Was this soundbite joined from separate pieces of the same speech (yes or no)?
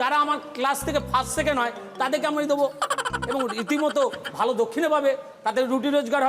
no